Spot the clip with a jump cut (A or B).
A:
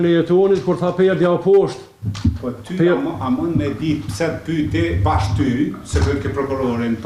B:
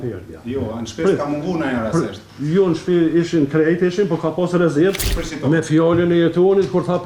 B